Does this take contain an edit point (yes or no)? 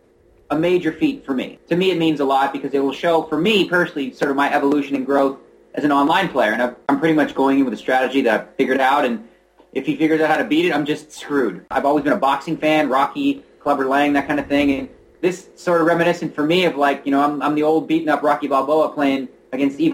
yes